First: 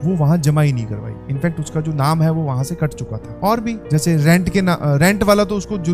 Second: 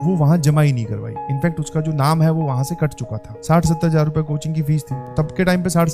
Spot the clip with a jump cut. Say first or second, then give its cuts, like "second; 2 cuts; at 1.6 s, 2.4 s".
second; 2 cuts; at 3.3 s, 5.1 s